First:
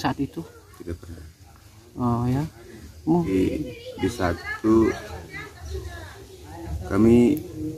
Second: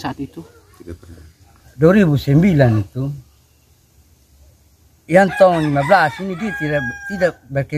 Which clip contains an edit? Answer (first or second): second